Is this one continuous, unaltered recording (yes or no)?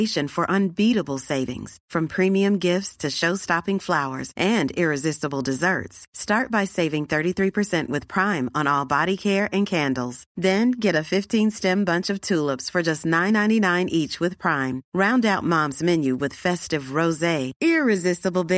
yes